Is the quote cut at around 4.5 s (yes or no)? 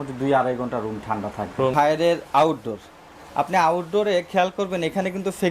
no